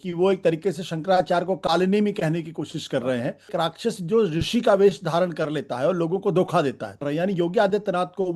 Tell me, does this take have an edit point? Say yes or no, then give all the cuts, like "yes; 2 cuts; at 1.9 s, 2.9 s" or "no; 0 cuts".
yes; 2 cuts; at 3.5 s, 7.0 s